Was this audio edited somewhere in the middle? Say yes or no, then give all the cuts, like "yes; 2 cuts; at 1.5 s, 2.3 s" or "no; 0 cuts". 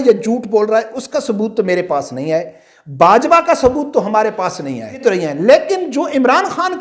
yes; 1 cut; at 5.0 s